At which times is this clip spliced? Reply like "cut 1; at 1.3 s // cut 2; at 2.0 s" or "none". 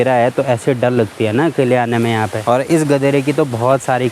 cut 1; at 2.4 s